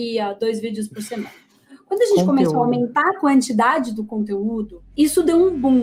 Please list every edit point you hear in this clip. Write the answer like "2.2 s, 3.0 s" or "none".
4.8 s